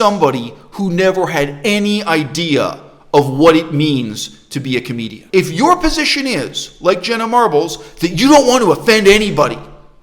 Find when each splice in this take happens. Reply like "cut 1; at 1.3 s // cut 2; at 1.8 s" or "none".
cut 1; at 5.2 s